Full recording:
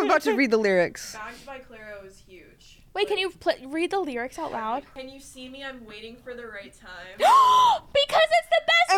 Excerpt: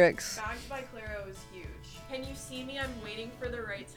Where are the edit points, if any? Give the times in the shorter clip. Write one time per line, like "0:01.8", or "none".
0:02.1